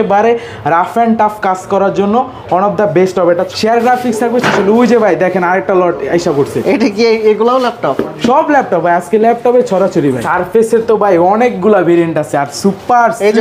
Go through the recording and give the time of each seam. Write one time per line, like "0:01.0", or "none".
0:03.6
0:10.2